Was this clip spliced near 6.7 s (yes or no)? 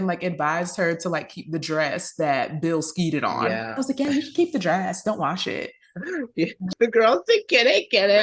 yes